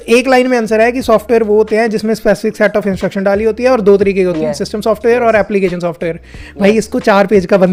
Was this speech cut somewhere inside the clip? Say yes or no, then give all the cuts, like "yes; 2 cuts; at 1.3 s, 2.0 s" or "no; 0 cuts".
no; 0 cuts